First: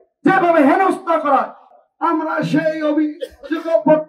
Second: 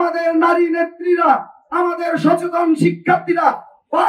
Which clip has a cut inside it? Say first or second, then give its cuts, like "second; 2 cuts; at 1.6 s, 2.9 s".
first; 1 cut; at 1.7 s